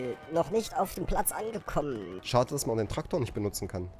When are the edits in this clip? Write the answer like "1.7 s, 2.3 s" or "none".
2.1 s